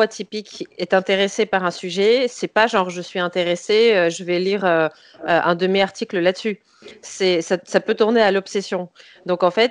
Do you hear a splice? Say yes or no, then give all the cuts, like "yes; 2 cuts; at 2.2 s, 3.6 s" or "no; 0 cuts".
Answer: no; 0 cuts